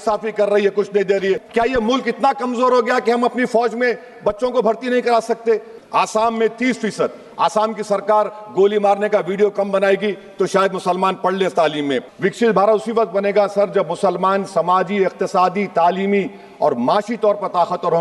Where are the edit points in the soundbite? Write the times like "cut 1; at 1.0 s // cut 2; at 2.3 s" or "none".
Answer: cut 1; at 1.4 s // cut 2; at 5.7 s // cut 3; at 12.1 s

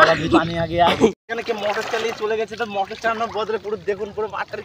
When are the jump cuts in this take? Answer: cut 1; at 1.4 s

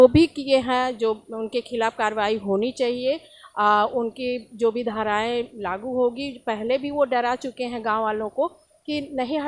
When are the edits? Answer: none

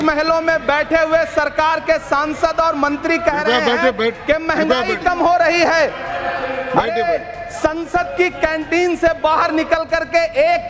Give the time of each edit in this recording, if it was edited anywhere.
none

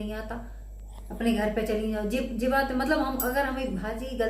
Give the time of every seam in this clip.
none

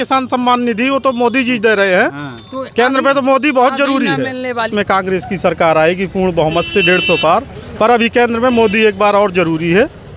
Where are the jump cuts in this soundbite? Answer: cut 1; at 4.7 s

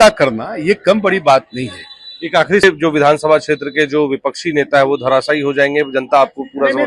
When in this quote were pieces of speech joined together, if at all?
cut 1; at 2.6 s

